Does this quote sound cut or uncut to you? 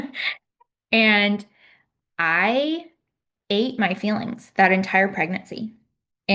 uncut